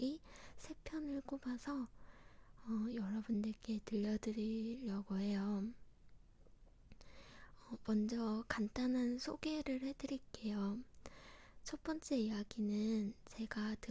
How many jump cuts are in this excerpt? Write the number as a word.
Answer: one